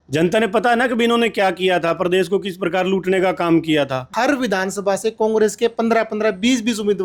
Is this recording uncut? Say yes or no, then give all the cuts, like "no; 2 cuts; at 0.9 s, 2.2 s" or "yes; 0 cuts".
no; 1 cut; at 4.1 s